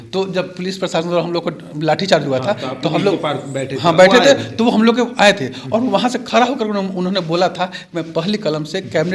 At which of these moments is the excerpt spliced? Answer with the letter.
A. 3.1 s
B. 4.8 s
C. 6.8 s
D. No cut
D